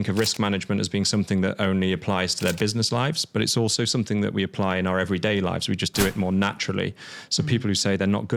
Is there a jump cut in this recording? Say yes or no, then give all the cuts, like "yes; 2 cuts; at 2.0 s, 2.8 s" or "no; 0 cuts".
no; 0 cuts